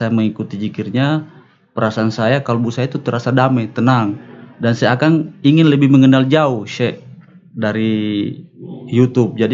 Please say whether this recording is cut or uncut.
uncut